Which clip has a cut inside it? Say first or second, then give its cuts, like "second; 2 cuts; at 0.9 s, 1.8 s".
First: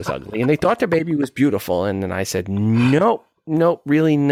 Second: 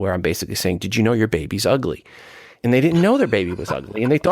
second; 1 cut; at 2.6 s